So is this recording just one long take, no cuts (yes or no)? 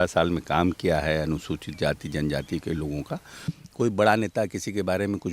no